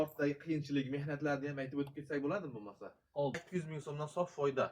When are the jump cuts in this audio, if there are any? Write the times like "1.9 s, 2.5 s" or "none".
3.4 s